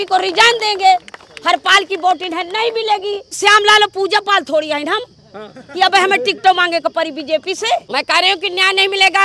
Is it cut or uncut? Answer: cut